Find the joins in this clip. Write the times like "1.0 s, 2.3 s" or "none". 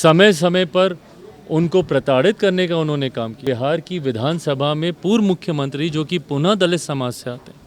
3.4 s